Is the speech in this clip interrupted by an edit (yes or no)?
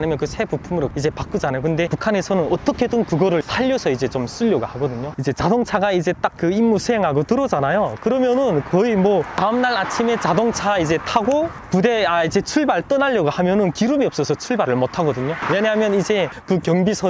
yes